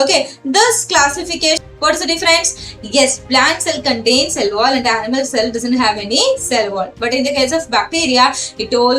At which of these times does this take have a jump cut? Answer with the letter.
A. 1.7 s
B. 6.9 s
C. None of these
A